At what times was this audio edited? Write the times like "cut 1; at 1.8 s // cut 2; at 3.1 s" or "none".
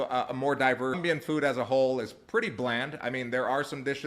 cut 1; at 1.0 s